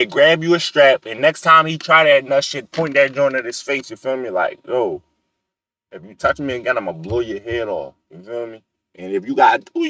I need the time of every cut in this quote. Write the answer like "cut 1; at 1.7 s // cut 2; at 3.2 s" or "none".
none